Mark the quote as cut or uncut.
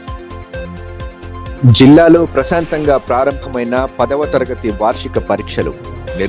cut